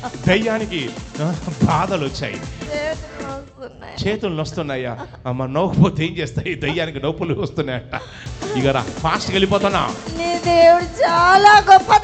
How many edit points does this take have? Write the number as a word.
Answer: two